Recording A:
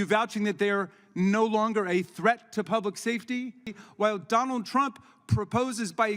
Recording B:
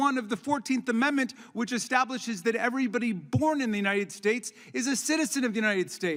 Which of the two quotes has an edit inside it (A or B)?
A